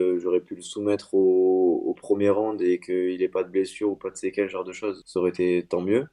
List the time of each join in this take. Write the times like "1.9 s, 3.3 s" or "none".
5.0 s